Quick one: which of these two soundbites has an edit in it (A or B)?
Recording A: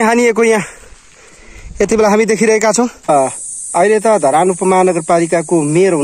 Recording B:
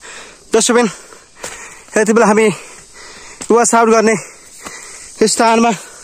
A